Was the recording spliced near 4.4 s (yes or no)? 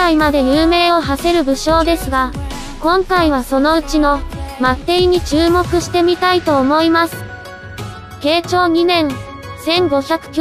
no